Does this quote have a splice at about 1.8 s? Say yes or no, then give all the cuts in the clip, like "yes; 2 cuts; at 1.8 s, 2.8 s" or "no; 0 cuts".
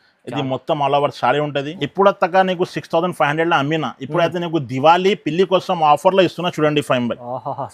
yes; 1 cut; at 1.8 s